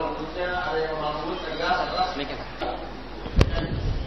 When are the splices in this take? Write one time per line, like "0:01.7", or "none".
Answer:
0:02.6